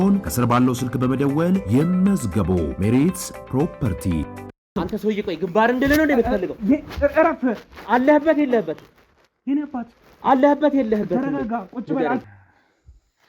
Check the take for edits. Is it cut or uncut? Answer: cut